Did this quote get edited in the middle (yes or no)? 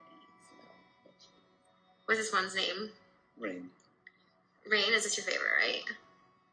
no